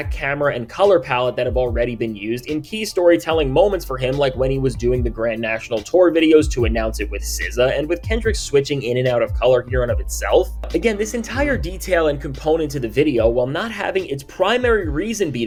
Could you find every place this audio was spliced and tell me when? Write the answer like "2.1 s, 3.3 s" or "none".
none